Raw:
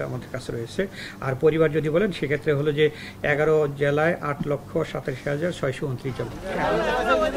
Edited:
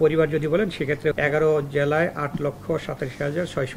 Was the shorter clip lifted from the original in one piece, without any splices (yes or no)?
no